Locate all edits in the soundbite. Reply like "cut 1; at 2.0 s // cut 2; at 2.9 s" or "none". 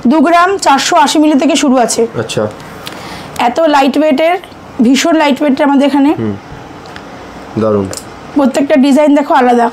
none